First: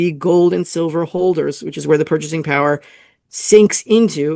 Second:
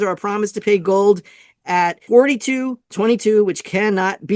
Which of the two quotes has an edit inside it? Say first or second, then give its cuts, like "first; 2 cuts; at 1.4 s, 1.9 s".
second; 1 cut; at 2.0 s